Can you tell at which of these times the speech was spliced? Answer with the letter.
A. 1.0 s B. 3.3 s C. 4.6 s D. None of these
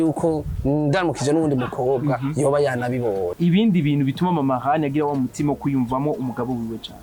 B